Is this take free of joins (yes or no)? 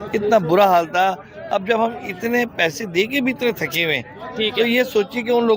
yes